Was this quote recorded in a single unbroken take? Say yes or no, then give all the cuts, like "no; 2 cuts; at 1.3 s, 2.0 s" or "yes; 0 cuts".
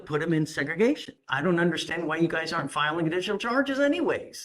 no; 1 cut; at 1.2 s